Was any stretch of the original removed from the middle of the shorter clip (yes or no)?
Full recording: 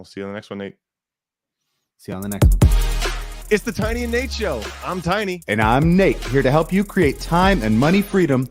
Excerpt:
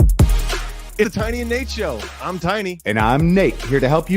yes